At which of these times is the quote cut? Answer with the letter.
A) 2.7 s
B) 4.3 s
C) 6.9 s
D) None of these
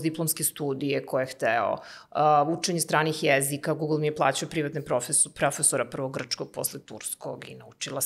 D